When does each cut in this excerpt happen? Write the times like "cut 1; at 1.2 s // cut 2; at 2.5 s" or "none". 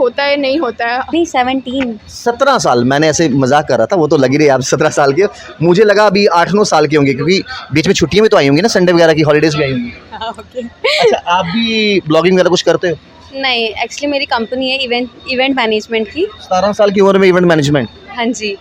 cut 1; at 1.1 s